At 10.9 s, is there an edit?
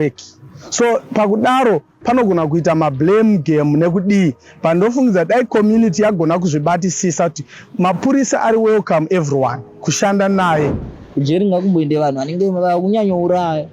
yes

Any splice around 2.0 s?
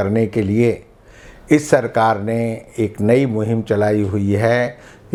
no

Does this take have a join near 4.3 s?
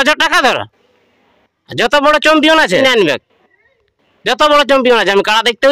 no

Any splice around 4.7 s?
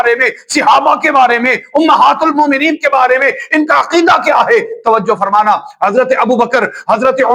no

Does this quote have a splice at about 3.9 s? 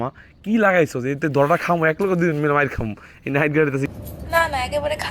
yes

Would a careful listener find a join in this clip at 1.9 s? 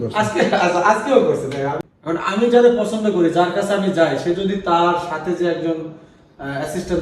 yes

